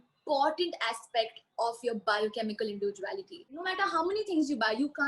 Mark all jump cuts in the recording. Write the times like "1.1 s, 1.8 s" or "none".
3.6 s